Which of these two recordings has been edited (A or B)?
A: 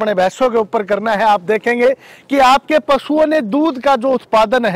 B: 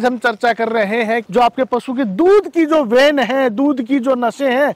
B